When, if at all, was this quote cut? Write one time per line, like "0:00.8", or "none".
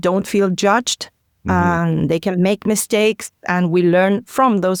none